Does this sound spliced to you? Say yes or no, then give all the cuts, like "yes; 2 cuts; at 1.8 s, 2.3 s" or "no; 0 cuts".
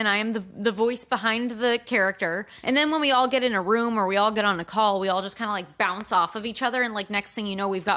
yes; 1 cut; at 2.5 s